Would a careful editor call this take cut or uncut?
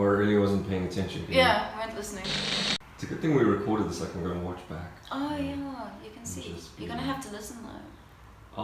cut